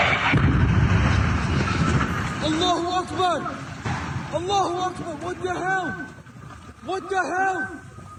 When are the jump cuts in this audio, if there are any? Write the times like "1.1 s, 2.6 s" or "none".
none